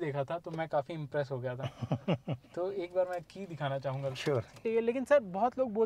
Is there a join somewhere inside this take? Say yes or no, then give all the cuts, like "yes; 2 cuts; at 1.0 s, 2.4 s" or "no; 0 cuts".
yes; 1 cut; at 4.6 s